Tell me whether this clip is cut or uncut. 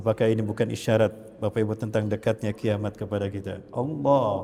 uncut